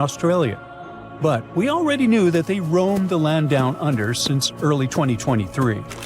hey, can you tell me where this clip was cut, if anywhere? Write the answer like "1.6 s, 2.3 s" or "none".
none